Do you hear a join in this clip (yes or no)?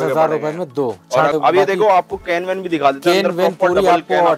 yes